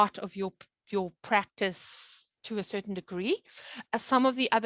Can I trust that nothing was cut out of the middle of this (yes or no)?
yes